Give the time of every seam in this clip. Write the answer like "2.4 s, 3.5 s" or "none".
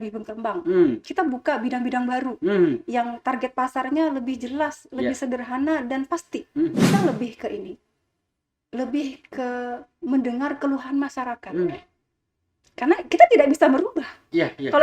6.9 s